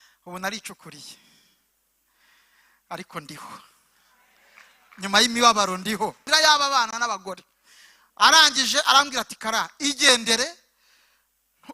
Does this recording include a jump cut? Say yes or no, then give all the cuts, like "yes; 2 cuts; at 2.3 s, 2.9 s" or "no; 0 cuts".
yes; 1 cut; at 6.3 s